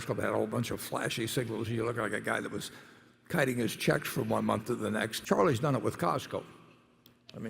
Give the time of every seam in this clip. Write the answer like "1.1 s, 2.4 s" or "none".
5.2 s